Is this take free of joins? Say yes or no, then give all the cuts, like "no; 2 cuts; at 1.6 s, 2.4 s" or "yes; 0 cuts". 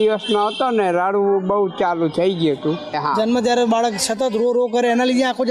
no; 1 cut; at 3.0 s